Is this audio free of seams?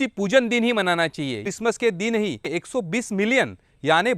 no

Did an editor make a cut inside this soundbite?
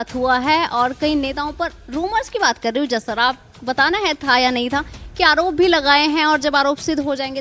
no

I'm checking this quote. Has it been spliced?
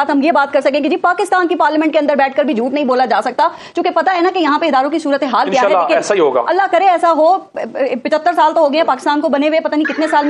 no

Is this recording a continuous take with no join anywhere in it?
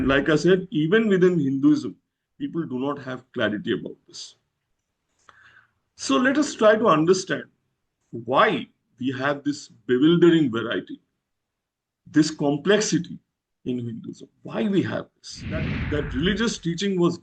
no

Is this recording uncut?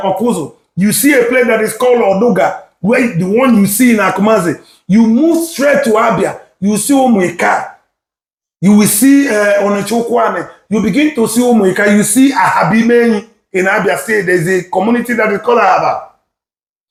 yes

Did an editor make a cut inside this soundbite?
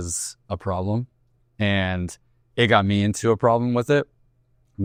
no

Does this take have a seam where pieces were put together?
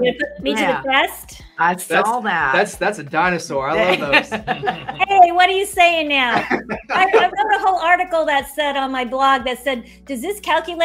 no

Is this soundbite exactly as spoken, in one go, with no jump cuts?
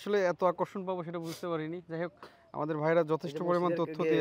yes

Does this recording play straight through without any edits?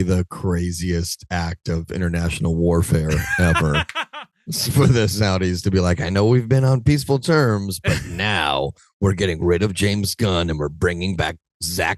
yes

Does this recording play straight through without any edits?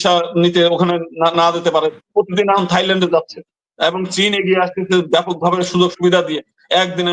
yes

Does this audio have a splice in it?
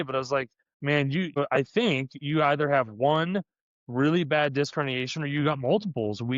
yes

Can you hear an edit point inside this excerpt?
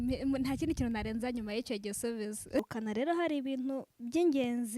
yes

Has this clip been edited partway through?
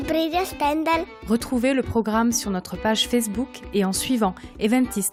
no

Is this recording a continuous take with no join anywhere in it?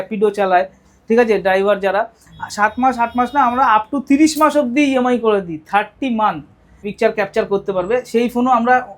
no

